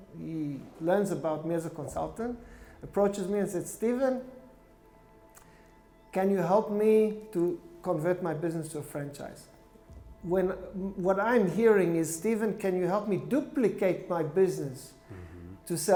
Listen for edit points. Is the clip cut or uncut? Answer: uncut